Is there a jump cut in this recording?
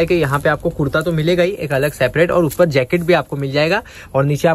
no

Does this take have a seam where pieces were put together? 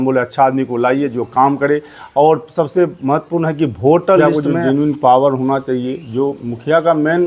yes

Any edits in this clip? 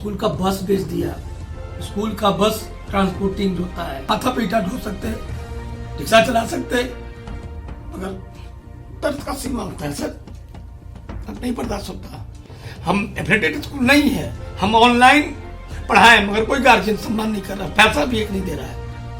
yes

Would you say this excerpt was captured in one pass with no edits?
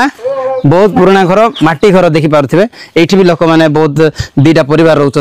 yes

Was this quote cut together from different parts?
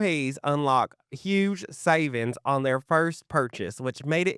no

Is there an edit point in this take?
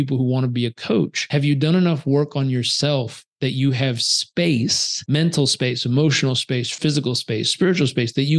yes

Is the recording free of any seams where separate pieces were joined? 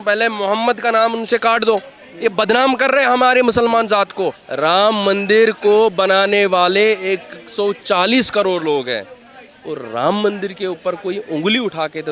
no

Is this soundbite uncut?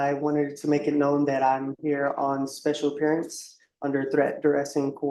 yes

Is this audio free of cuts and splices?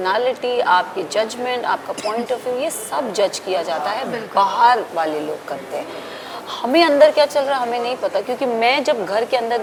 yes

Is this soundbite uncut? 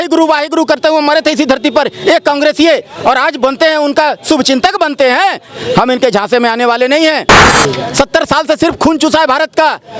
no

